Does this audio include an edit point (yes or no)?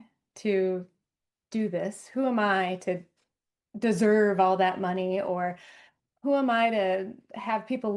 no